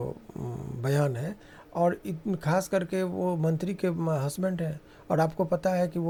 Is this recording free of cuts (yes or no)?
yes